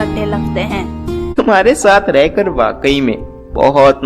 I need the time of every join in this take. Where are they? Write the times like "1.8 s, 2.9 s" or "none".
1.3 s